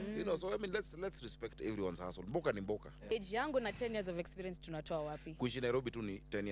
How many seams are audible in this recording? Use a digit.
1